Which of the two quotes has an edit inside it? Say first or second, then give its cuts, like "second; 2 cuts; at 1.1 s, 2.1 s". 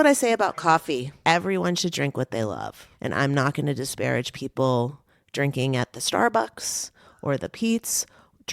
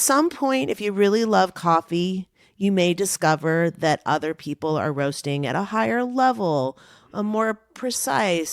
first; 2 cuts; at 1.1 s, 2.9 s